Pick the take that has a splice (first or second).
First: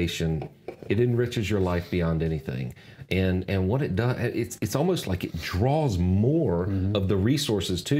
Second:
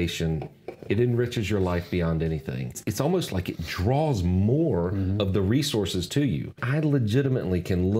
second